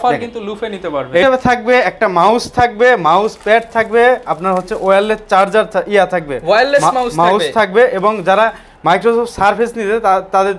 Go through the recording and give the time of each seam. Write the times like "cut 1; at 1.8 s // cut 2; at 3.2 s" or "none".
cut 1; at 1.2 s